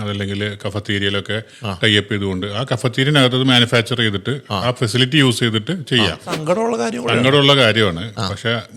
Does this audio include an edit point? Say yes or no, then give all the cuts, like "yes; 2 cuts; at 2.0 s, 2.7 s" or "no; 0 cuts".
yes; 1 cut; at 6.4 s